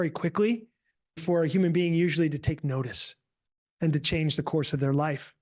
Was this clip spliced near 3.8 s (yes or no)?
no